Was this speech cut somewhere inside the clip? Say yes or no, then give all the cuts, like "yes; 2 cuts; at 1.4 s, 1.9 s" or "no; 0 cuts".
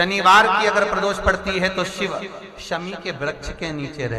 no; 0 cuts